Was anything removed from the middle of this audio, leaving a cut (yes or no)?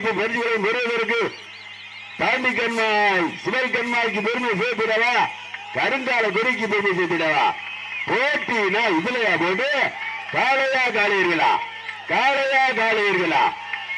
no